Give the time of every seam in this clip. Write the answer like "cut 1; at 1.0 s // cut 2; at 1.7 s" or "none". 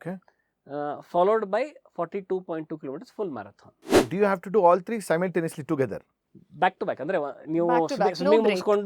cut 1; at 3.9 s